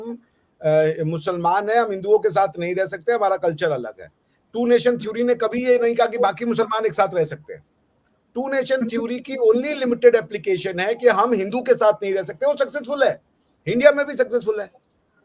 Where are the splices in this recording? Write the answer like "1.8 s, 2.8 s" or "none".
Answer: none